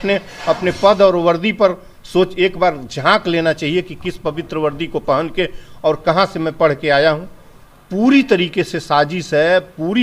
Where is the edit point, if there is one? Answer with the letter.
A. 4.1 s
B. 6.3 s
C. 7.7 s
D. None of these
C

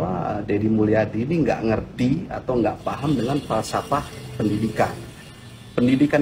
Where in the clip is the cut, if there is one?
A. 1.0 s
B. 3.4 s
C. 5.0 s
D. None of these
D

